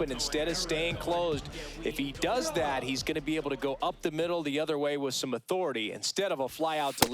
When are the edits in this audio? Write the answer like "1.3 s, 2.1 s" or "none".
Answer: 6.0 s